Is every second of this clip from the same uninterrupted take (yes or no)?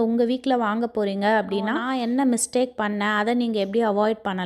no